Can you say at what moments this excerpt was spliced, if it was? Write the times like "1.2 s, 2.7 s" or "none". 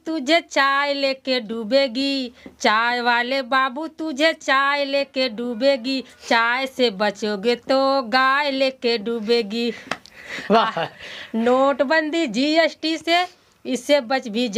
none